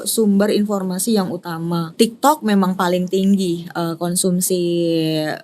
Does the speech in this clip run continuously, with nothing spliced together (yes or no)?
no